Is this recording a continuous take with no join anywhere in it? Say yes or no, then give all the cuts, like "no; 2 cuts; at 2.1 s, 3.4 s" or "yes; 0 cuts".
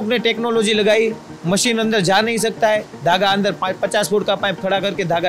yes; 0 cuts